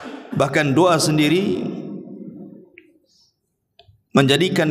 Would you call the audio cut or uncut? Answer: uncut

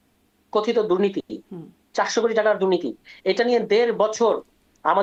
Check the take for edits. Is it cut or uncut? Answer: uncut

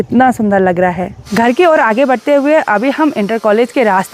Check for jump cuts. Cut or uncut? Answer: uncut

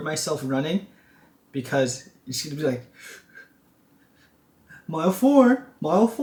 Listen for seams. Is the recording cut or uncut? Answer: uncut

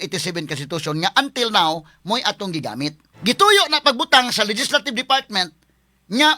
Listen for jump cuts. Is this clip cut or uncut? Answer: cut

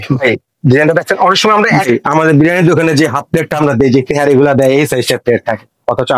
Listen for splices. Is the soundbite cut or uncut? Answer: cut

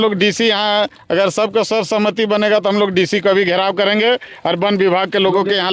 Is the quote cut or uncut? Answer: uncut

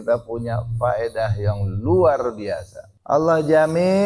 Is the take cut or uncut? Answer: cut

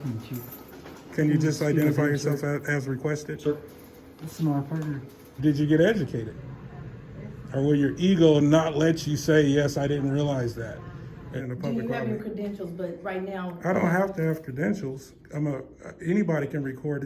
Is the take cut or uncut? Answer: cut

